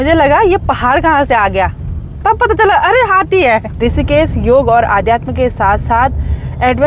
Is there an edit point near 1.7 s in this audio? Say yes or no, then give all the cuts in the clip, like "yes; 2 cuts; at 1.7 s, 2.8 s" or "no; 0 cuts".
no; 1 cut; at 3.7 s